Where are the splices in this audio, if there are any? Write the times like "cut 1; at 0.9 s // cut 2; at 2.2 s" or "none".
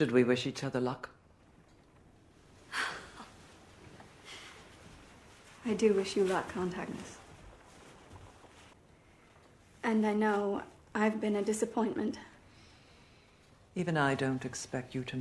cut 1; at 8.8 s